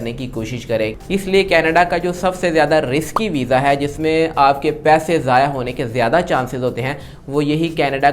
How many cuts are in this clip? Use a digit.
1